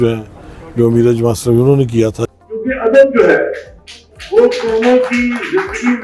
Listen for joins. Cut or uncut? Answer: cut